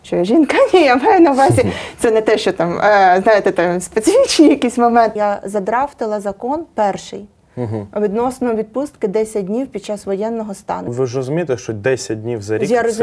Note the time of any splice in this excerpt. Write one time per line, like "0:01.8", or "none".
0:05.1
0:10.9